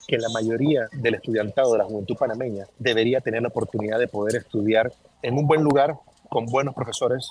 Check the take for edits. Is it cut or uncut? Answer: cut